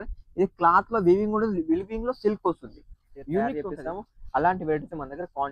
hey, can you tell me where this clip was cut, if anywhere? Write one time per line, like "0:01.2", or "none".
0:03.6